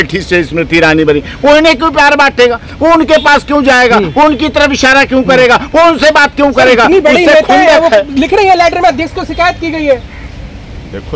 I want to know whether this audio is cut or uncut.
uncut